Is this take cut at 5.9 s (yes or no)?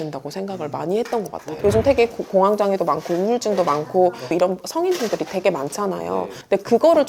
no